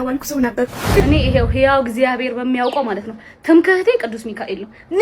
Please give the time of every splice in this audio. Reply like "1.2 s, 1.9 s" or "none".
1.0 s